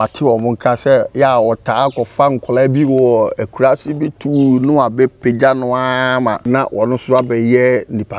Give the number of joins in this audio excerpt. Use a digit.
1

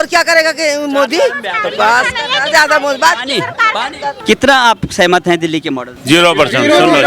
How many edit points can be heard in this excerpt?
2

